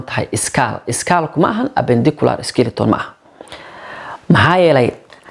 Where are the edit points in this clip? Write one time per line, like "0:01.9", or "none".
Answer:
none